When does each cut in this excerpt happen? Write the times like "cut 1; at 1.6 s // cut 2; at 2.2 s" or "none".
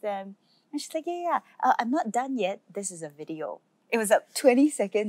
cut 1; at 3.7 s